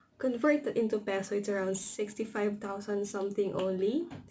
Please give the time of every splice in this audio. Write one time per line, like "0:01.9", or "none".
none